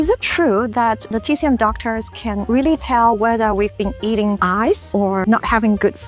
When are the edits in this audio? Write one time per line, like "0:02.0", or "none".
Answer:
none